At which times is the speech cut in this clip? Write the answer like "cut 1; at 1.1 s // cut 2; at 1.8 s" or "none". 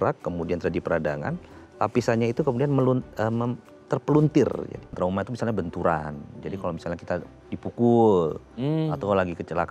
cut 1; at 4.9 s